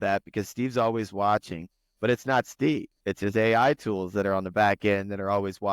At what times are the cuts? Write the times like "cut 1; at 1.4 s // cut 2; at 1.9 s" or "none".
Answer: cut 1; at 2.9 s